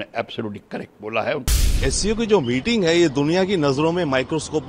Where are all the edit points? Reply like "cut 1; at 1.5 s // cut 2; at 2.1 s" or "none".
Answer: cut 1; at 1.8 s